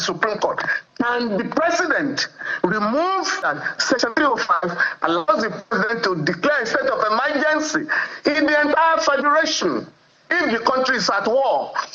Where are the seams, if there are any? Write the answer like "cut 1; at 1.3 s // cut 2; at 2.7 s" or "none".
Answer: cut 1; at 3.4 s

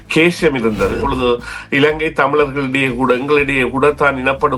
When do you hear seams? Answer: cut 1; at 1.0 s

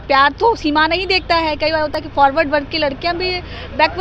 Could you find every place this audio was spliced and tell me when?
none

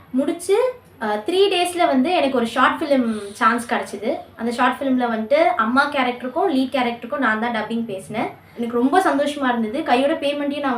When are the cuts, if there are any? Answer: cut 1; at 8.4 s

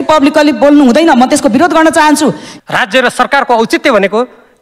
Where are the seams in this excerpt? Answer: cut 1; at 2.5 s

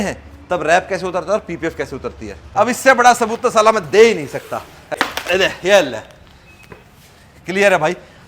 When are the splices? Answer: cut 1; at 2.4 s // cut 2; at 4.9 s

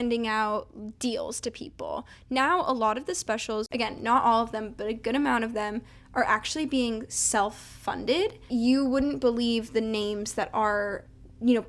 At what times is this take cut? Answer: cut 1; at 3.7 s // cut 2; at 8.5 s

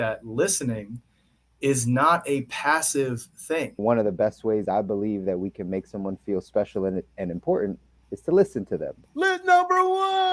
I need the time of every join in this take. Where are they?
cut 1; at 3.8 s // cut 2; at 9.0 s

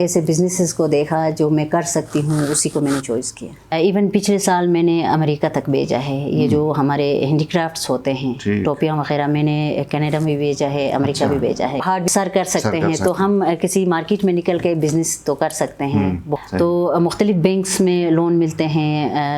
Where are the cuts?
cut 1; at 3.7 s // cut 2; at 11.8 s // cut 3; at 16.3 s

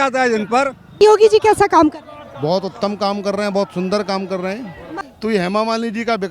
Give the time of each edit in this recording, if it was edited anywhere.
cut 1; at 1.0 s // cut 2; at 4.9 s

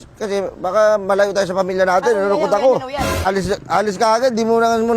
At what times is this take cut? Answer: cut 1; at 3.3 s

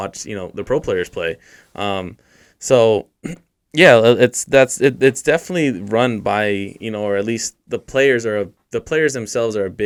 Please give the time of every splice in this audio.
none

